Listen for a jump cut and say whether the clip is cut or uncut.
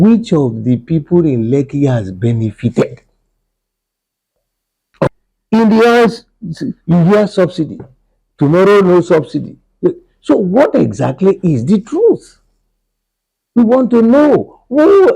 cut